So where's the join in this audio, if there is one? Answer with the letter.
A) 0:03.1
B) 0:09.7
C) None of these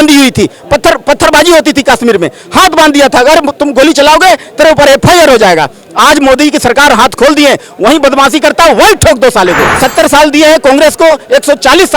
B